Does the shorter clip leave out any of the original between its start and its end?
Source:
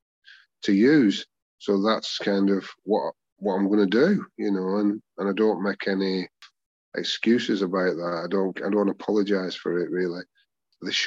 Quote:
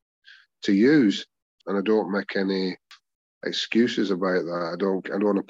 yes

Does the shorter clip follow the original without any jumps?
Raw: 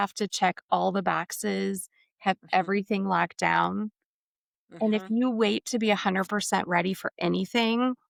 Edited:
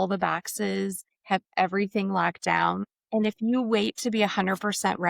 no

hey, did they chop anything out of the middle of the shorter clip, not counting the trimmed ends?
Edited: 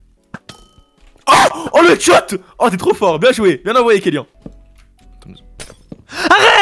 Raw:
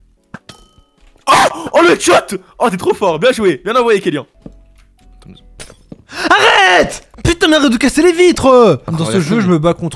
no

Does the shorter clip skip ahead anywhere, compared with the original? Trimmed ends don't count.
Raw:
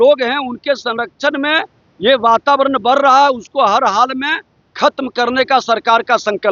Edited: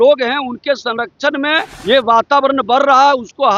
yes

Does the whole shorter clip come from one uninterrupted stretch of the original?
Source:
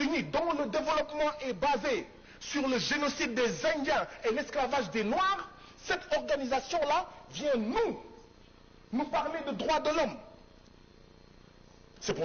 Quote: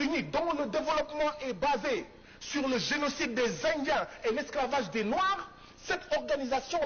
yes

